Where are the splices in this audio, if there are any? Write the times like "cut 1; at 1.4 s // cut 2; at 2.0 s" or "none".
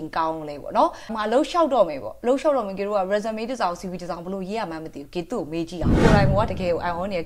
cut 1; at 1.1 s // cut 2; at 6.0 s

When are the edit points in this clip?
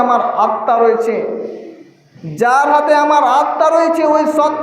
none

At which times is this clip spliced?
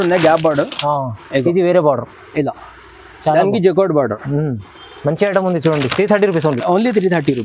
none

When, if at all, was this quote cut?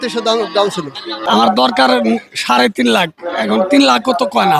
cut 1; at 1.2 s

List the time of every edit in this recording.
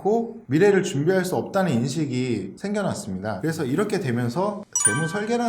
cut 1; at 3.5 s

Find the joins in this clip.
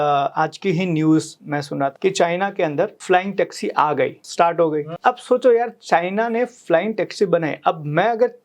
cut 1; at 1.9 s // cut 2; at 3.0 s // cut 3; at 4.2 s // cut 4; at 4.9 s

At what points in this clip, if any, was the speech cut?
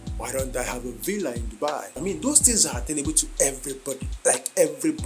cut 1; at 1.9 s

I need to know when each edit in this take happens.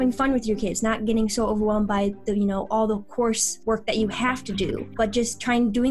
cut 1; at 3.5 s // cut 2; at 4.9 s

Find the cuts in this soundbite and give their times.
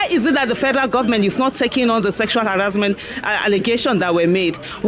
none

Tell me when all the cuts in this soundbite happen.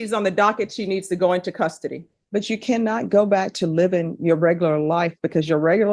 cut 1; at 2.1 s

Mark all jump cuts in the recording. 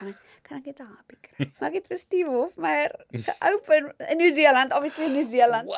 cut 1; at 1.5 s

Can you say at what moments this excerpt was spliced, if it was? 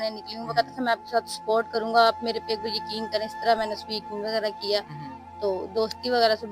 none

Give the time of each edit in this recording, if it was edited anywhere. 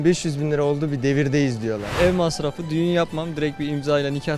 cut 1; at 1.9 s

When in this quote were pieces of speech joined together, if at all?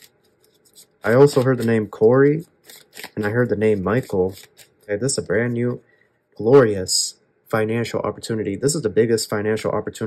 cut 1; at 4.8 s

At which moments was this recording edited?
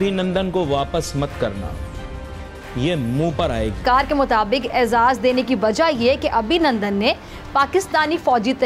cut 1; at 3.8 s

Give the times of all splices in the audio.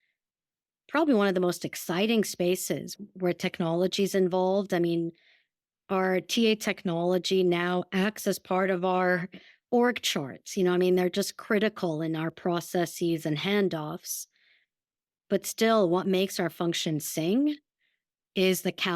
none

